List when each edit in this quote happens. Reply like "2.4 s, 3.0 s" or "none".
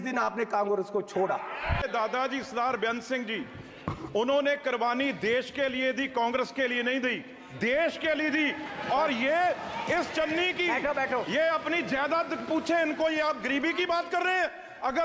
1.8 s